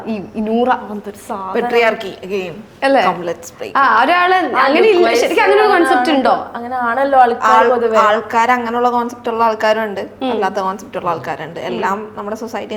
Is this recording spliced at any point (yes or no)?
no